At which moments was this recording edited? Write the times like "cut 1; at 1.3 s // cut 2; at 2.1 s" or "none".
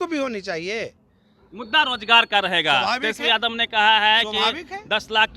none